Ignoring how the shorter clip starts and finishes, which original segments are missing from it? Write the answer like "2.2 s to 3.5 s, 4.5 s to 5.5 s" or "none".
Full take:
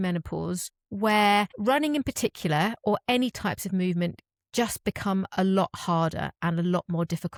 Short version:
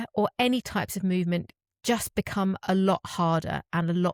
none